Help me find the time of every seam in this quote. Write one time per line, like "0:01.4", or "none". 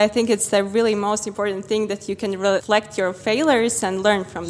0:02.6